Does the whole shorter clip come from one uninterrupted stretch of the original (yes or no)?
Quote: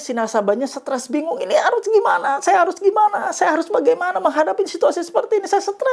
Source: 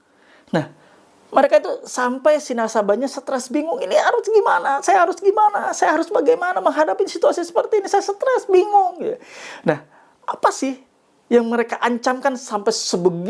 yes